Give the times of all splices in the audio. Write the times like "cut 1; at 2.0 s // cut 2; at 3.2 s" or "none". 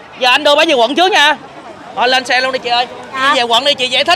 cut 1; at 3.2 s